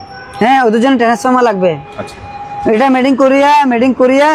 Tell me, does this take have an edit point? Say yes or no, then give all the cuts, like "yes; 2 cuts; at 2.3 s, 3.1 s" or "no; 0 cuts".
no; 0 cuts